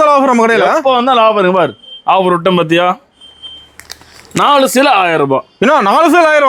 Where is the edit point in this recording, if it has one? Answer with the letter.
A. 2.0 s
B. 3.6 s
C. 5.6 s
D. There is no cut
D